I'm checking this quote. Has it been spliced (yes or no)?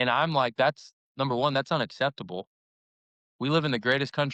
no